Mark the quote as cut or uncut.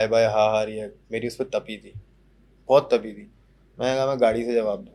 uncut